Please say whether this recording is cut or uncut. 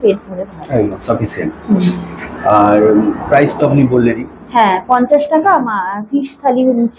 uncut